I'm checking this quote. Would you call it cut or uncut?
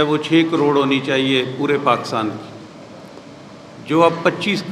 uncut